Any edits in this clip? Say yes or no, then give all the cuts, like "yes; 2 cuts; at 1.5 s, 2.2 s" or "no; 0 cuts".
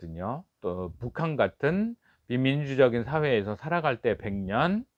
no; 0 cuts